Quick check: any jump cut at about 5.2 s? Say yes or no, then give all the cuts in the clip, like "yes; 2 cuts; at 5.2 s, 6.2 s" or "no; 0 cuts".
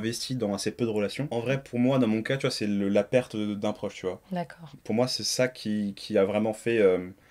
no; 1 cut; at 1.2 s